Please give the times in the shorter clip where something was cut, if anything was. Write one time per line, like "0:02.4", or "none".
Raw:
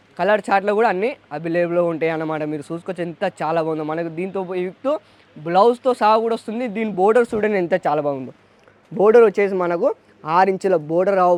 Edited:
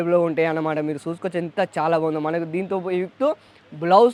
none